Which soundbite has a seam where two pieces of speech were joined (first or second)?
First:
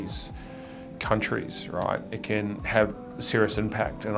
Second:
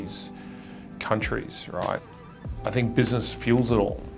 second